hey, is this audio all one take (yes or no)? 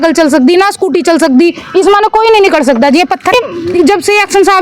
no